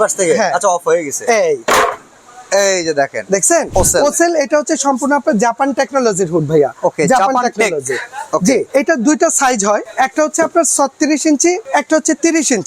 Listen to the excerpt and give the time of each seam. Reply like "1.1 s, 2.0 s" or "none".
3.7 s, 8.7 s, 9.9 s, 11.6 s